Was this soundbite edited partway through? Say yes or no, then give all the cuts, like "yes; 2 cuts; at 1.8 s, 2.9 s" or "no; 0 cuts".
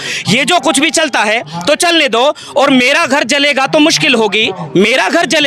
no; 0 cuts